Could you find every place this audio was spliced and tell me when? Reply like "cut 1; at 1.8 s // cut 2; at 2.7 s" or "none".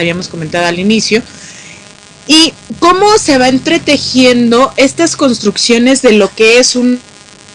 cut 1; at 3.5 s